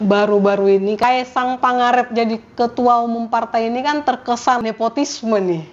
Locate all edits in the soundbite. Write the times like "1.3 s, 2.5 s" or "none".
1.0 s

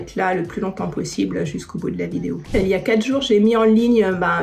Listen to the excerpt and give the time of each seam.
2.5 s

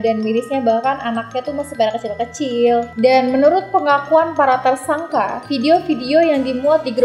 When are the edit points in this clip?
2.9 s

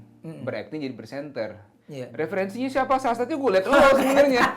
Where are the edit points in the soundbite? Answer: none

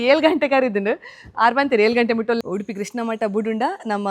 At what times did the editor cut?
2.4 s

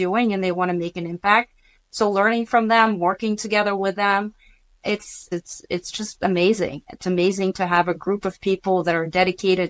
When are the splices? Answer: 5.2 s

